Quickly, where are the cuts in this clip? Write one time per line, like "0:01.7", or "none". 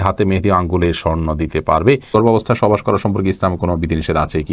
0:02.1